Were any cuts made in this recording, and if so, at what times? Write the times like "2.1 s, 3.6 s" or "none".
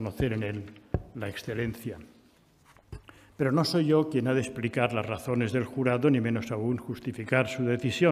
2.1 s